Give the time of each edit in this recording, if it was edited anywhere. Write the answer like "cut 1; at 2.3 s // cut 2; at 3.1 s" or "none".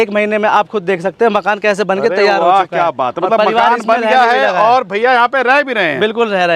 none